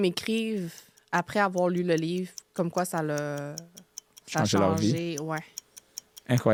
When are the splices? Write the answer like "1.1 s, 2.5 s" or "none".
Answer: none